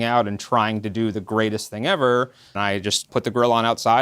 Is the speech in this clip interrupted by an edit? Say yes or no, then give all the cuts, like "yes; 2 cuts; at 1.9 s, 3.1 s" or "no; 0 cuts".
yes; 1 cut; at 2.6 s